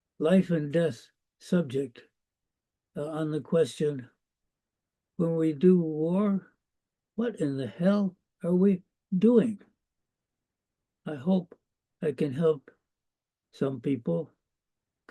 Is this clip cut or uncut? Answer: cut